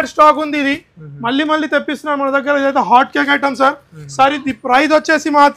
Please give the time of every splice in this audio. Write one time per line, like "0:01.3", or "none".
none